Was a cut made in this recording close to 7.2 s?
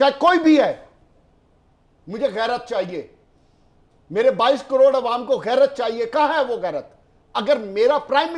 no; 0 cuts

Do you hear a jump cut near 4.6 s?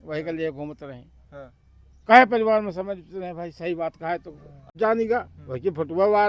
yes; 1 cut; at 4.6 s

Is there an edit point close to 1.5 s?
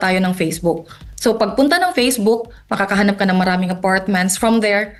no; 0 cuts

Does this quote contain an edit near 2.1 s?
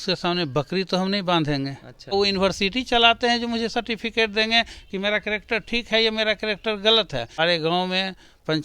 yes; 2 cuts; at 2.1 s, 7.4 s

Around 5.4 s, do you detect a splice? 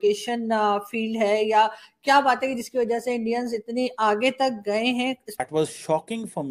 yes; 1 cut; at 5.4 s

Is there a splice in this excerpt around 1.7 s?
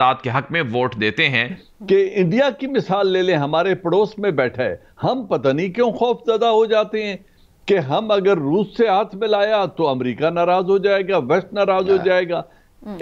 yes; 1 cut; at 1.7 s

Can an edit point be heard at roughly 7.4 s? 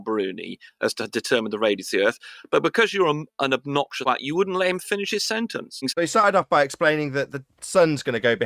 no; 2 cuts; at 4.0 s, 5.9 s

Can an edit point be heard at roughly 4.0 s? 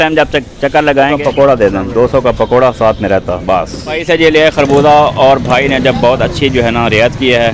yes; 2 cuts; at 1.2 s, 4.0 s

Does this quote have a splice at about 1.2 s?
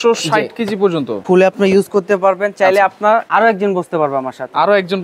yes; 2 cuts; at 1.2 s, 3.3 s

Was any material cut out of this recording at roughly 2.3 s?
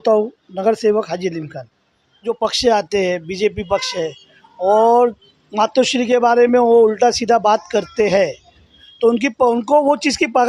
yes; 1 cut; at 2.3 s

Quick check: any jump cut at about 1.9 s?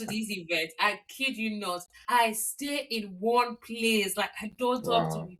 yes; 1 cut; at 1.9 s

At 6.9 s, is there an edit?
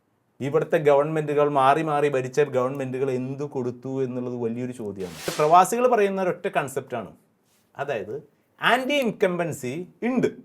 no; 1 cut; at 5.3 s

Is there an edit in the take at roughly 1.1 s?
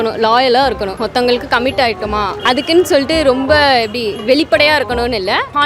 no; 1 cut; at 2.3 s

